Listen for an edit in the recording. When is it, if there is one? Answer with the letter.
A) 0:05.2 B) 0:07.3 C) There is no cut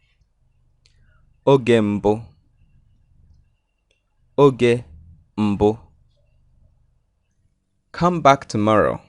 B